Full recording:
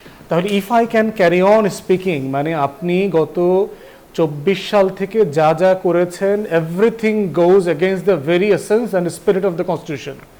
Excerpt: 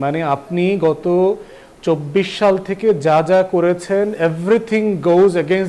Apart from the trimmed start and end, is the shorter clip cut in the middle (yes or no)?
no